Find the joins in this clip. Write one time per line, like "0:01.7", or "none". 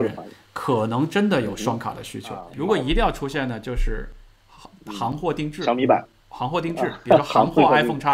0:02.5